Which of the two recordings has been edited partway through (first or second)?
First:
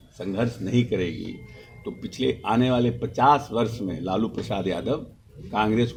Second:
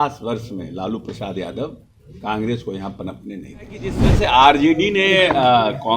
second